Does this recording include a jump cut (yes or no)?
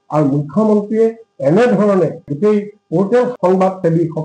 no